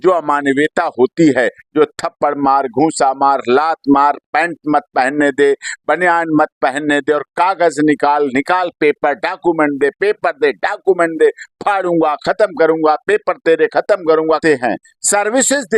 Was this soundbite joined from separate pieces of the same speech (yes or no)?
yes